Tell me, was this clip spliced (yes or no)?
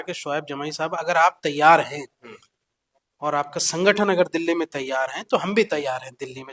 no